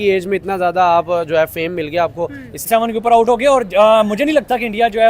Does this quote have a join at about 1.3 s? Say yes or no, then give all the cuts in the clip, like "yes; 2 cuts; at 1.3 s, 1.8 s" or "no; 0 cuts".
no; 1 cut; at 2.6 s